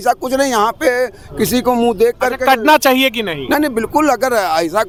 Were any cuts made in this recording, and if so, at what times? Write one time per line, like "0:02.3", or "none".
none